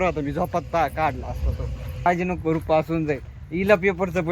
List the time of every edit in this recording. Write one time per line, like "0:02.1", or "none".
0:02.1